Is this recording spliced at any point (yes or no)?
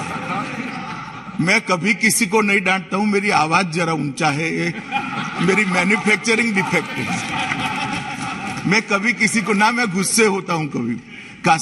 no